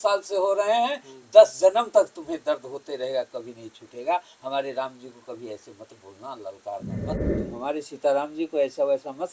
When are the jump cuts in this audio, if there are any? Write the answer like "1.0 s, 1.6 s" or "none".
7.3 s